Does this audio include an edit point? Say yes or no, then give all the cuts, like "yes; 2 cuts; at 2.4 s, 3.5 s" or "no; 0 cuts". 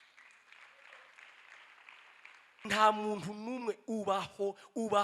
yes; 1 cut; at 2.5 s